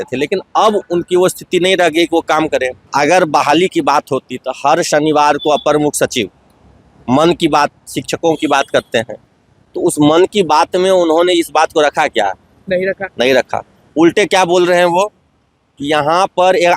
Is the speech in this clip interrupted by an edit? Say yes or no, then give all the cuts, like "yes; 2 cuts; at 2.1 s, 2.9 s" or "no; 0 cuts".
yes; 1 cut; at 2.8 s